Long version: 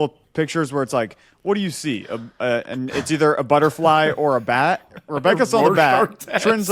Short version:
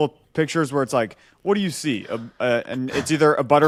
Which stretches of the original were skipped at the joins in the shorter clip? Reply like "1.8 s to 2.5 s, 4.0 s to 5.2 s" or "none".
none